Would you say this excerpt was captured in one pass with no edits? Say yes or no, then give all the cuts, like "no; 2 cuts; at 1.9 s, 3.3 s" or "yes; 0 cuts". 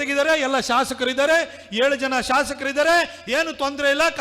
yes; 0 cuts